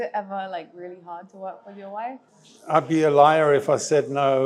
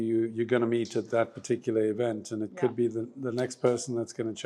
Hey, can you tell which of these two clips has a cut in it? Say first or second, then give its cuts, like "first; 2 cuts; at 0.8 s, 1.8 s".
first; 1 cut; at 2.3 s